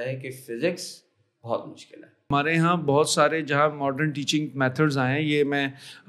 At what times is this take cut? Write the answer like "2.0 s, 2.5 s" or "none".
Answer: 2.3 s